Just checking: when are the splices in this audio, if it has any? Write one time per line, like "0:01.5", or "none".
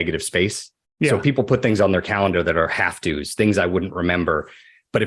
none